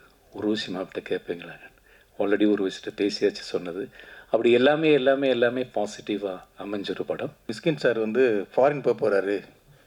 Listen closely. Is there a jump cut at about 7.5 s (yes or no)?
yes